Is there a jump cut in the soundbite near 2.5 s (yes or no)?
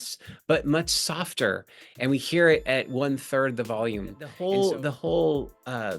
no